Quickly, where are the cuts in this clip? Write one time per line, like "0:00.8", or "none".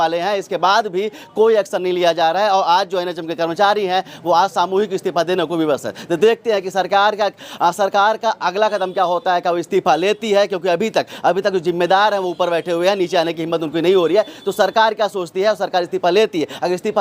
none